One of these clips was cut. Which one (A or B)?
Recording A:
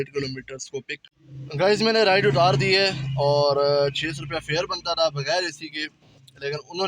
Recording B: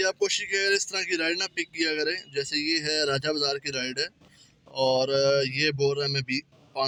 A